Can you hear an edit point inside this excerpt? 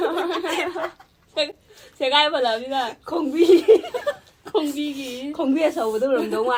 no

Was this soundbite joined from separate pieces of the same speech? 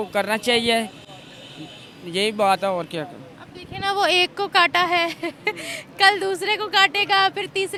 no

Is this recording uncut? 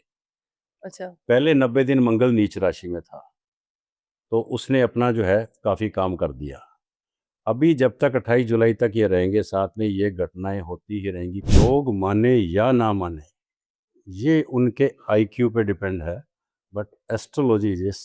no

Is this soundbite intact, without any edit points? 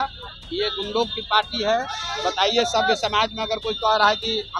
yes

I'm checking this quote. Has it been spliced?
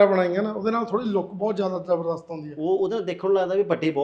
no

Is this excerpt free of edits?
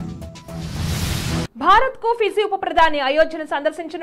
no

